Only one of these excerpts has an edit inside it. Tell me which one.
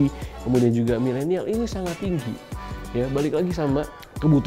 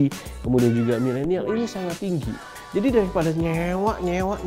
second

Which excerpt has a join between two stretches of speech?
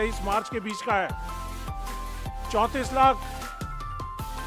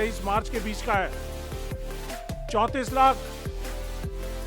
second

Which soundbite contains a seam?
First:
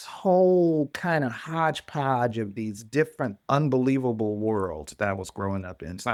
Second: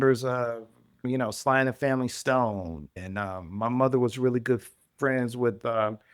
second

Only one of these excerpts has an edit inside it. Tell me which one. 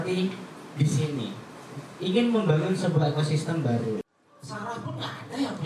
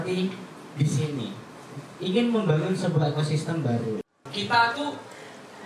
second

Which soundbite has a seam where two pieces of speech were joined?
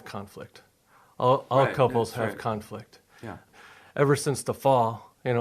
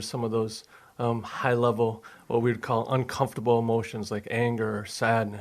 first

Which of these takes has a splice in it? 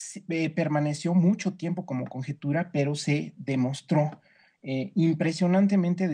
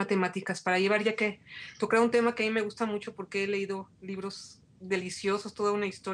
first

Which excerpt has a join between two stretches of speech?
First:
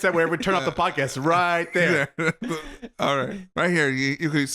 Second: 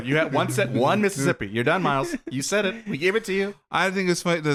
first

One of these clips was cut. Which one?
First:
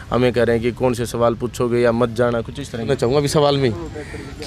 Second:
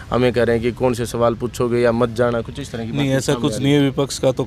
first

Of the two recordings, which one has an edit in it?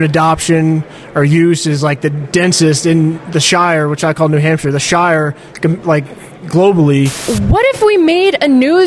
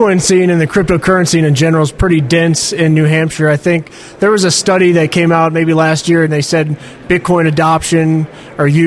first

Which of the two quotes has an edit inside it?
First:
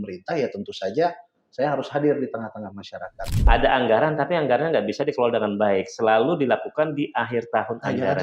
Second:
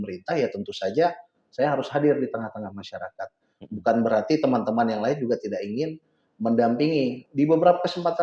first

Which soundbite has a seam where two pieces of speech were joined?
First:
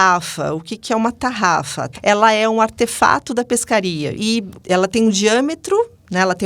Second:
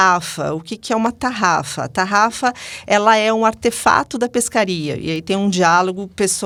first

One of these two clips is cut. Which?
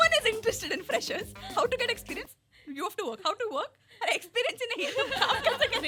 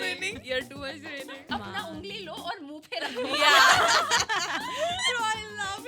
second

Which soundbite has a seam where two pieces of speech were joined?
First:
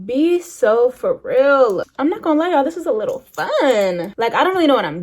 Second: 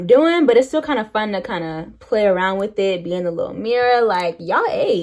first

